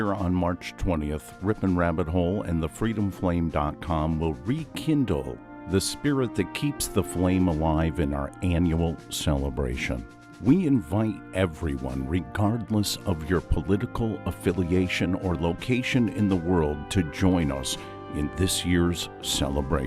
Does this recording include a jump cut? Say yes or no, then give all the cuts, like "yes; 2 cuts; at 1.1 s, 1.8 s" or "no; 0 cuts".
no; 0 cuts